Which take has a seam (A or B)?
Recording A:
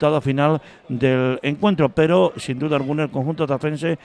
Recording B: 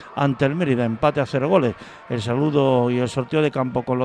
B